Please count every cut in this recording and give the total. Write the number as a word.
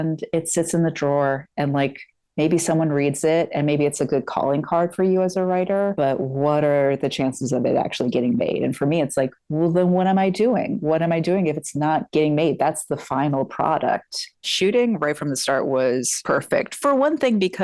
two